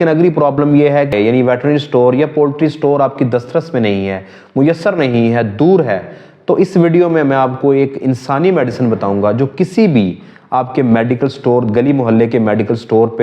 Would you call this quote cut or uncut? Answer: cut